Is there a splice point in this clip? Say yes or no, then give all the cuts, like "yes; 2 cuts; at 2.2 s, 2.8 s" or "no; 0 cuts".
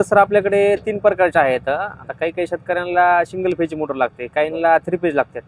no; 0 cuts